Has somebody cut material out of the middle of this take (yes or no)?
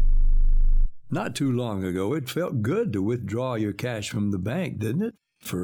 yes